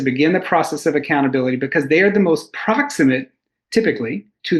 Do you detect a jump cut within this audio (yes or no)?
no